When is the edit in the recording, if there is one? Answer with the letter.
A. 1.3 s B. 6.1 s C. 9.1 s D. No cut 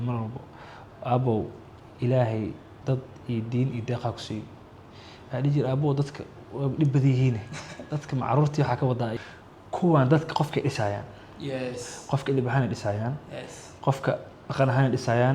C